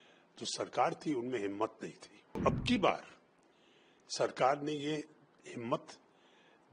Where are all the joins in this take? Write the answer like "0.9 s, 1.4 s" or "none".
2.4 s